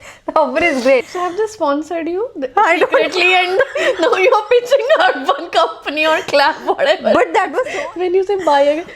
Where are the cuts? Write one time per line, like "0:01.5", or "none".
0:01.2
0:07.6